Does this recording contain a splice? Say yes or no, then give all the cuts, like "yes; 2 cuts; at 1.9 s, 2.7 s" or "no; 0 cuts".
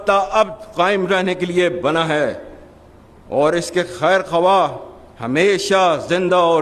no; 0 cuts